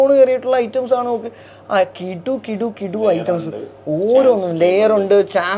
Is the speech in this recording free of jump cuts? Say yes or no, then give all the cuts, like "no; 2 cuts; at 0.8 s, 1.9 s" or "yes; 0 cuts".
yes; 0 cuts